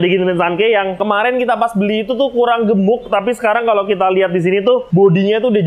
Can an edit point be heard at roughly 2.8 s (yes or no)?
no